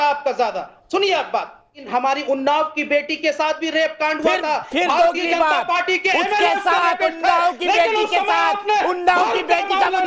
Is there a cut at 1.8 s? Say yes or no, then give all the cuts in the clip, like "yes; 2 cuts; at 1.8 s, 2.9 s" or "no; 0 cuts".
yes; 1 cut; at 1.8 s